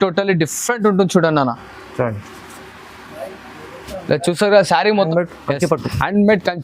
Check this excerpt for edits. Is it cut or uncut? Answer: cut